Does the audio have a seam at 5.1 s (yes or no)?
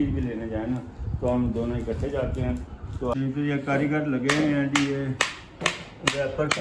no